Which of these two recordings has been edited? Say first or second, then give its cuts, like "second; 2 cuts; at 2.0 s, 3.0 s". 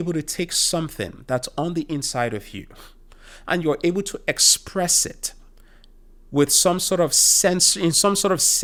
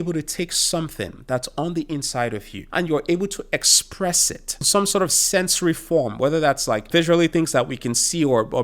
second; 3 cuts; at 2.6 s, 4.7 s, 6.9 s